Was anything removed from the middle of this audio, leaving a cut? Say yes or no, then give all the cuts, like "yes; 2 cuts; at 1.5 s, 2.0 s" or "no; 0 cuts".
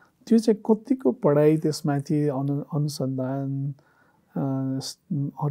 no; 0 cuts